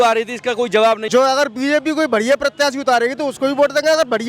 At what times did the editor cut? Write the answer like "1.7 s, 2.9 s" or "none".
1.0 s